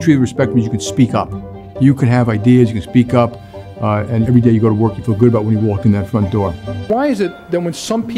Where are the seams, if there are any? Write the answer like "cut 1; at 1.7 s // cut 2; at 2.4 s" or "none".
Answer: cut 1; at 6.8 s